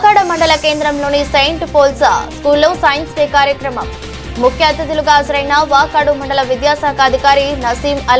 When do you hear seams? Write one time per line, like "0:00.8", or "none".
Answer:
none

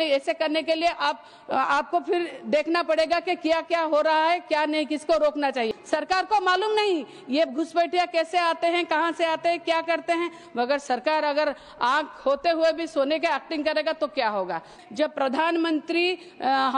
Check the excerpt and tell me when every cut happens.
0:05.8
0:14.7

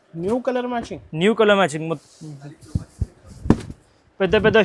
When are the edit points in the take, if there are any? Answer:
0:02.0

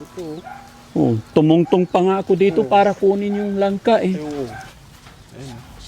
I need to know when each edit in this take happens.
0:04.6

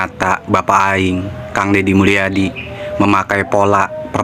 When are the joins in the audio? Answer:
none

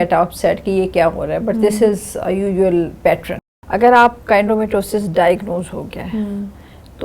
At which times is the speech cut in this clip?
0:03.3

